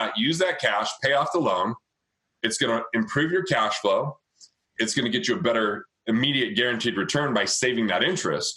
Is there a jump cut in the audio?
no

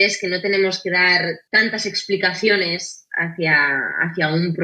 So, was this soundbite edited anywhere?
yes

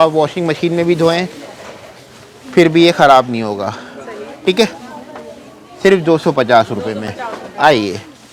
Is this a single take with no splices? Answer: yes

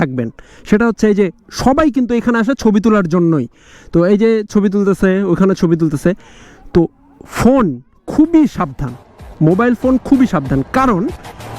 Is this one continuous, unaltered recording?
yes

